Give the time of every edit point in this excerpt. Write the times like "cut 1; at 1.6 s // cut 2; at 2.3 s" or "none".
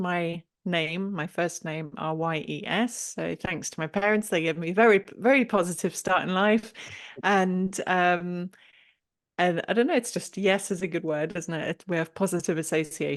none

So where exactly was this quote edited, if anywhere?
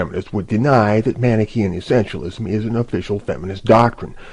none

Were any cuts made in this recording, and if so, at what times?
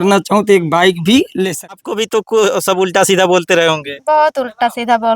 cut 1; at 1.8 s

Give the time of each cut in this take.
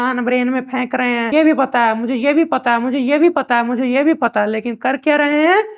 cut 1; at 1.3 s

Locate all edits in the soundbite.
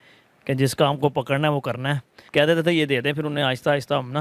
cut 1; at 2.2 s

